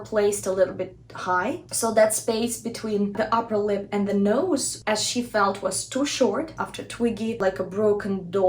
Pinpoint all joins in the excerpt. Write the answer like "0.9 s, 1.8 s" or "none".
1.7 s, 6.5 s